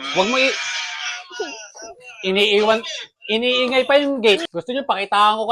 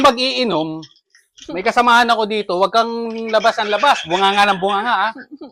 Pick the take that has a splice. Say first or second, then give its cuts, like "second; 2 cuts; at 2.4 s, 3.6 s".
first; 1 cut; at 4.4 s